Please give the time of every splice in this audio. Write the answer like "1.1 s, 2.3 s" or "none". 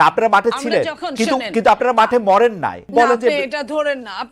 2.8 s